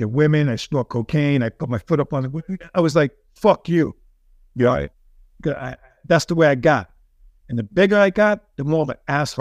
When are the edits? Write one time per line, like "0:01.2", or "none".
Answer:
none